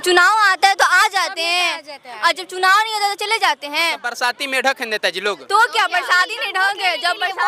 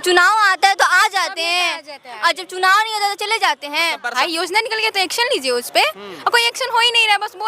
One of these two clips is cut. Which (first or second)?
second